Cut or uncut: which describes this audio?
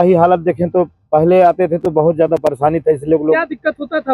uncut